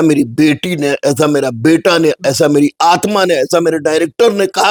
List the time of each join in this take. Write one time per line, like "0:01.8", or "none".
none

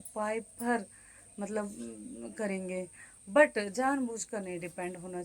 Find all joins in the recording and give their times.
none

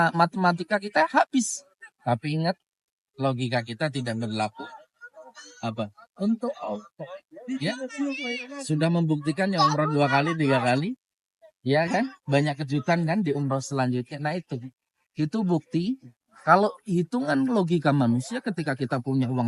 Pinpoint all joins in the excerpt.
none

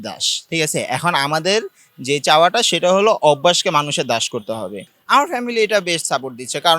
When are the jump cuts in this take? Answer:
0:04.9

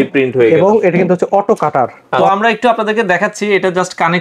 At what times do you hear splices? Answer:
0:02.1

